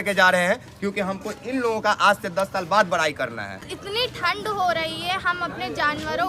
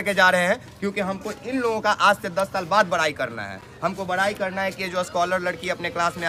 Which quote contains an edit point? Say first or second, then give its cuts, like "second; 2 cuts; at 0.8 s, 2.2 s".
first; 1 cut; at 3.7 s